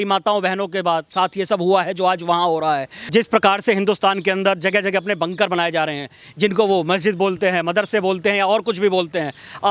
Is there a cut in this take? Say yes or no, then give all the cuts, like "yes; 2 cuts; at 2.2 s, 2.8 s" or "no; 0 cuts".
yes; 1 cut; at 3.1 s